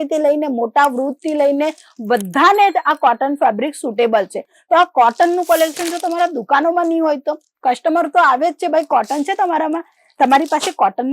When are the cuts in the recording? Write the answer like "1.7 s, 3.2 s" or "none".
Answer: none

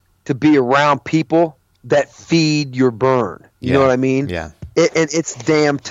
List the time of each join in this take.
none

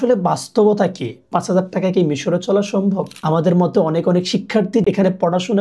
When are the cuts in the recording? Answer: 3.1 s, 4.8 s

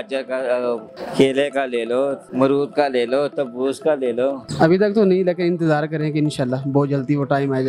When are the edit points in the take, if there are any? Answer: 1.0 s, 2.2 s, 4.5 s

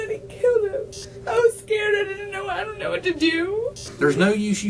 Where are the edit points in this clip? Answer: 1.1 s, 3.8 s

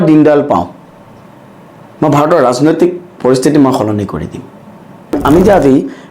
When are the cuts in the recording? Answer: 5.2 s

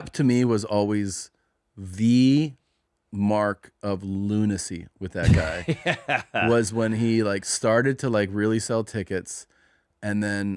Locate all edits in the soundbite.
none

